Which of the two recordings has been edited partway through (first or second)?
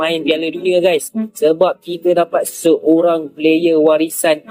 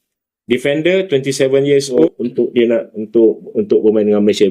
second